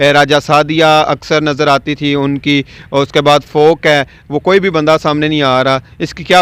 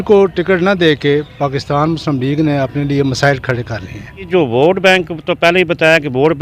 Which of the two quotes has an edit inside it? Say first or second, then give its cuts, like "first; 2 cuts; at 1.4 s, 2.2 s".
second; 1 cut; at 4.3 s